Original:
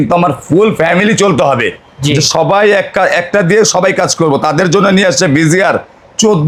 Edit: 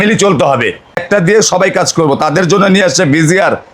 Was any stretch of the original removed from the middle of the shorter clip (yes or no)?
yes